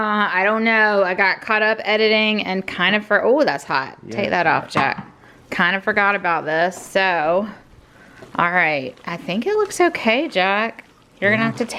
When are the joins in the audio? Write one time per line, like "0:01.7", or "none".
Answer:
none